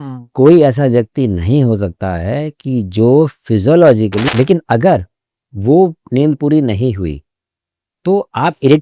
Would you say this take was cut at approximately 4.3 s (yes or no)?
yes